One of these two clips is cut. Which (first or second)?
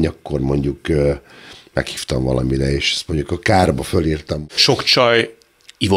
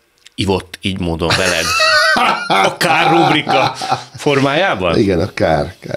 first